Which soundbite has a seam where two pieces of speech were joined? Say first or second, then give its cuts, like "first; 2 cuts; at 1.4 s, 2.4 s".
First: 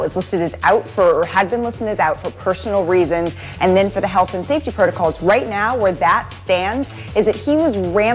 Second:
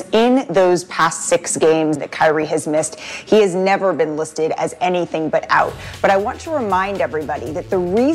second; 1 cut; at 2.0 s